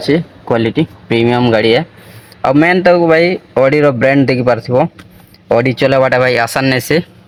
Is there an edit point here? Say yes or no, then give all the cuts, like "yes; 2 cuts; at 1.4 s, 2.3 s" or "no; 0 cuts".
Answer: no; 0 cuts